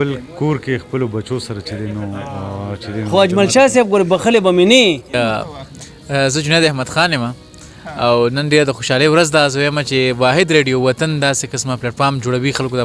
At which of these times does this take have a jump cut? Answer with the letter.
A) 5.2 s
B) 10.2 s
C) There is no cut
A